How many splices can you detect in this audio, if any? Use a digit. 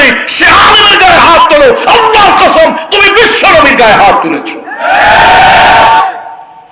0